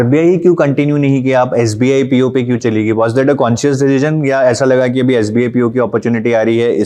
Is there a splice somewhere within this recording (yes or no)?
no